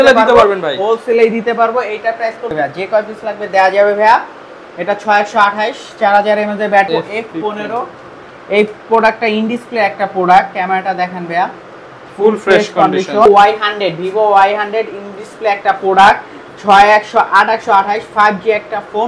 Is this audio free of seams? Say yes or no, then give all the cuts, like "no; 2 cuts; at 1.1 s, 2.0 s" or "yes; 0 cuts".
no; 3 cuts; at 2.5 s, 6.9 s, 13.3 s